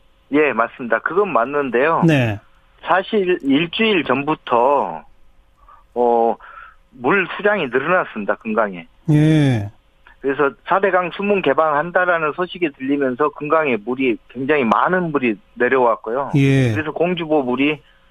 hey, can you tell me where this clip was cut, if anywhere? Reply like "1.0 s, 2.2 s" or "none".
none